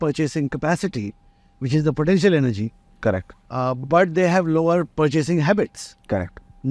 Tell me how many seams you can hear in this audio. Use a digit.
1